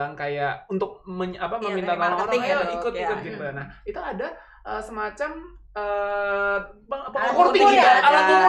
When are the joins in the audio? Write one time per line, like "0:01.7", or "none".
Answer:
none